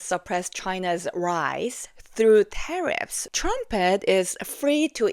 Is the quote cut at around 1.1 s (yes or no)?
no